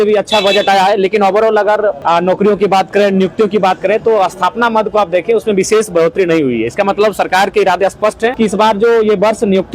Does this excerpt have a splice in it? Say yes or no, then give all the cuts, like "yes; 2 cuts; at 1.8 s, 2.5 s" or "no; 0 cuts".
yes; 2 cuts; at 2.0 s, 8.3 s